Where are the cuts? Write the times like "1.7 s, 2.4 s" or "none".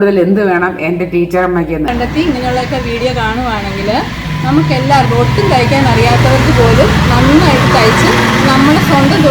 1.9 s